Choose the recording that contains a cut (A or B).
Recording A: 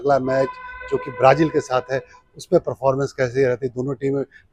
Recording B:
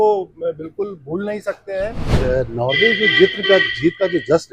B